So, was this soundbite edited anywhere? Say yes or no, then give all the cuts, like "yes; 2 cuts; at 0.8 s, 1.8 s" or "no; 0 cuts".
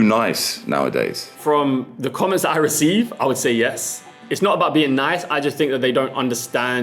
yes; 2 cuts; at 1.4 s, 4.2 s